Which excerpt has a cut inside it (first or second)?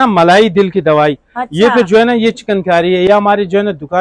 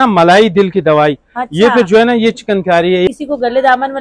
second